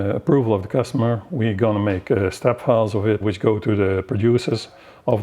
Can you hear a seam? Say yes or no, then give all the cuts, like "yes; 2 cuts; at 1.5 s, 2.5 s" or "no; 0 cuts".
yes; 1 cut; at 3.2 s